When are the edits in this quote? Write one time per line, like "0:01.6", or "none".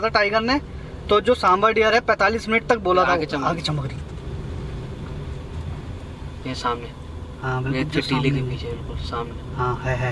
none